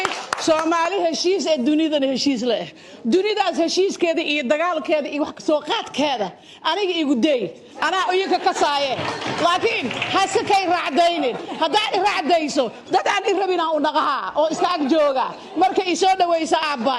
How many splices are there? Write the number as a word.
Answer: zero